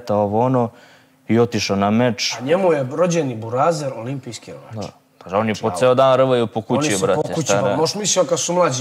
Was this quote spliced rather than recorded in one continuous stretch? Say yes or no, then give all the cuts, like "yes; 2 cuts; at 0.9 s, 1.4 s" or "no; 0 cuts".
yes; 1 cut; at 2.4 s